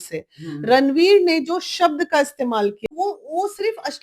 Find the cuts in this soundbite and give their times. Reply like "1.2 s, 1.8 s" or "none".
2.8 s